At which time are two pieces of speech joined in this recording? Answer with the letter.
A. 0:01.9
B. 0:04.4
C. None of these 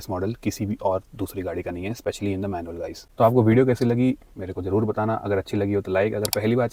C